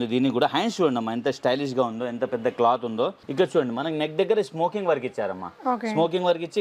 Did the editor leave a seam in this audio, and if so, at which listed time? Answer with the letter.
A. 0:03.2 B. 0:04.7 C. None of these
A